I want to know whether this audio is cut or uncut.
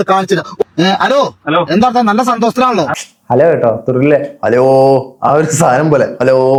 uncut